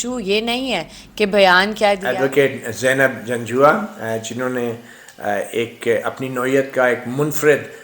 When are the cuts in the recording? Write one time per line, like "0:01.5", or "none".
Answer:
0:02.1